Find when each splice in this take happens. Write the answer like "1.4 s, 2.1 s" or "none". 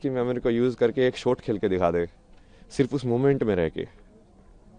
none